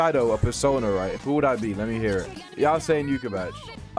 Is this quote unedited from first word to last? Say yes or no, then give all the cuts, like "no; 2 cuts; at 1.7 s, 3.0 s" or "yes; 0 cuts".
no; 1 cut; at 1.1 s